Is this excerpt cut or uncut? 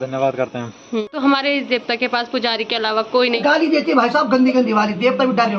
cut